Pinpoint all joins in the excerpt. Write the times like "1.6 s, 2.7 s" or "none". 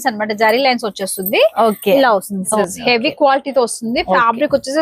2.6 s

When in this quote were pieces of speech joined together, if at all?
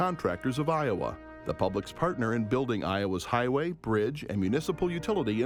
none

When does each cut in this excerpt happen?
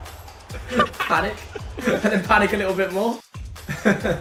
none

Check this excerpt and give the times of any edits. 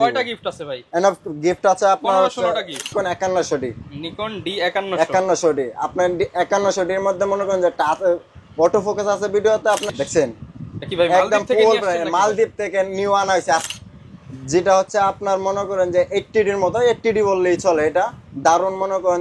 2.9 s, 9.8 s, 13.7 s

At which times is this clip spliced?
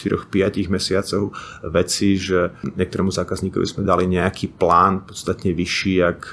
2.7 s

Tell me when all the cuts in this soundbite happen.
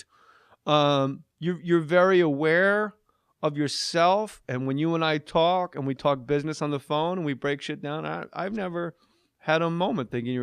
1.5 s

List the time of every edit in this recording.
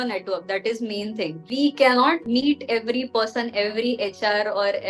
1.4 s, 2.2 s

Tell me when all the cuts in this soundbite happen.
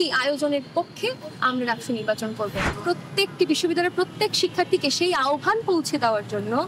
2.6 s

